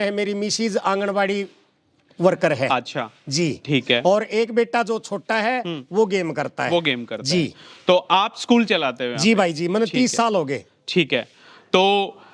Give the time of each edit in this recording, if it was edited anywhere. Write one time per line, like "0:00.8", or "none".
none